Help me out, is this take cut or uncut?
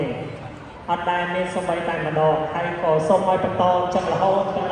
uncut